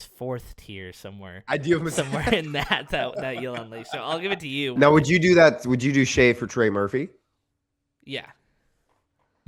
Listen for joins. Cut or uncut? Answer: cut